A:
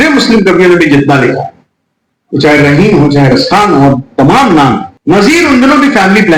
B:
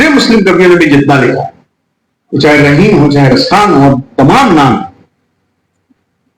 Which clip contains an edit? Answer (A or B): A